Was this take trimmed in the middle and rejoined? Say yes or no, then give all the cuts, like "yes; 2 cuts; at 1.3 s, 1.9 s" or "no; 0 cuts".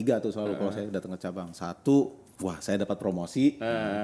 yes; 1 cut; at 2.2 s